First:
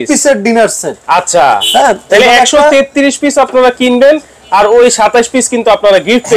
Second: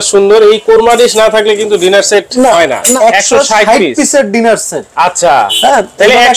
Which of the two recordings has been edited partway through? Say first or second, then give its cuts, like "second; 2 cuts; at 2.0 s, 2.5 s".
second; 1 cut; at 2.9 s